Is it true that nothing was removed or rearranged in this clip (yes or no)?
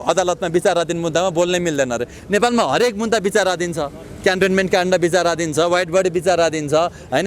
yes